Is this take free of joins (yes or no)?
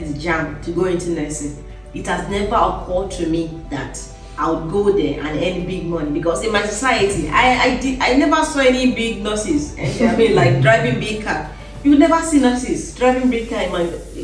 yes